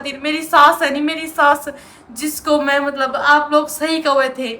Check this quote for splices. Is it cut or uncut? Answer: uncut